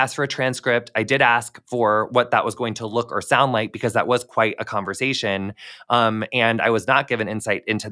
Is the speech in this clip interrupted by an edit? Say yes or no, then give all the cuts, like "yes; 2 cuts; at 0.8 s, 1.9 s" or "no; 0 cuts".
no; 0 cuts